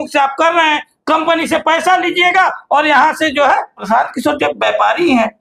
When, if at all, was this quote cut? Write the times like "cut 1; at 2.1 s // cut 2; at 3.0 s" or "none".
cut 1; at 3.9 s